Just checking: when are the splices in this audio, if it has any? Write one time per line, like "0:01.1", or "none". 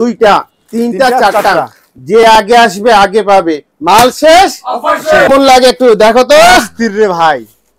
0:05.3